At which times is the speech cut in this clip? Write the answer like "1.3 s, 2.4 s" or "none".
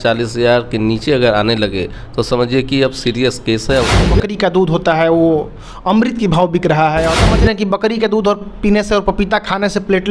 4.1 s, 7.3 s